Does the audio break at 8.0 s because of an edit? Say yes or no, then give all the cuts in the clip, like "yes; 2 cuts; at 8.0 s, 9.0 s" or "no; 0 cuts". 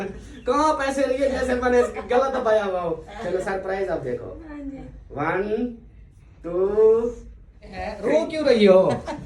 yes; 1 cut; at 8.0 s